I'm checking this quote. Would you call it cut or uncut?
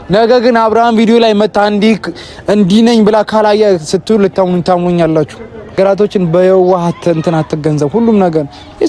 cut